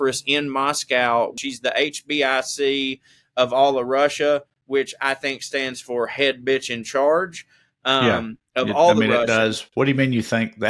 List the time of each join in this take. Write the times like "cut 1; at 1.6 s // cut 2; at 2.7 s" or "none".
cut 1; at 1.4 s

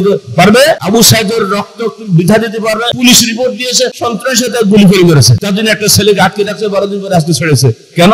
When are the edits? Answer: cut 1; at 0.8 s // cut 2; at 3.0 s // cut 3; at 4.0 s // cut 4; at 5.4 s

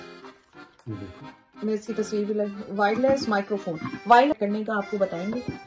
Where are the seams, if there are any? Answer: cut 1; at 4.3 s

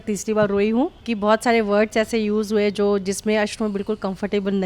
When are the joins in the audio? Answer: cut 1; at 1.0 s

